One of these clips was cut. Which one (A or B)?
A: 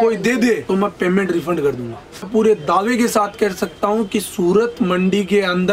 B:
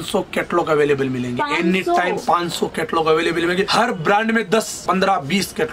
A